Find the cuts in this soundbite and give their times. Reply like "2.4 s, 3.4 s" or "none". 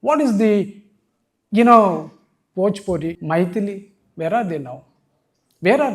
3.2 s